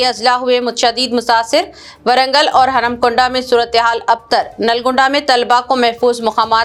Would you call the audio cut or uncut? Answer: uncut